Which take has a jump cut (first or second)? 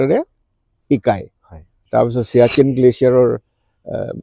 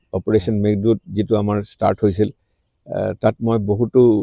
first